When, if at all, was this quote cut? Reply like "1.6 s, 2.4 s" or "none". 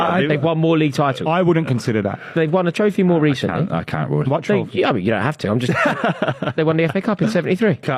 none